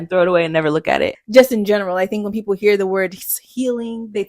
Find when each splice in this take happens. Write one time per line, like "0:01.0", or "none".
0:01.2